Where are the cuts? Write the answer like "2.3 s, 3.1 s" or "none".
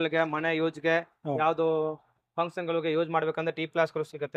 none